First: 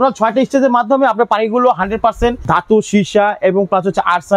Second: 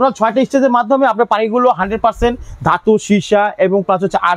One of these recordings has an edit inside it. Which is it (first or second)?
first